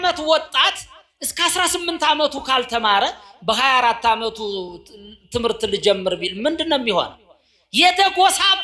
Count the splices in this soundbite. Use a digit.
0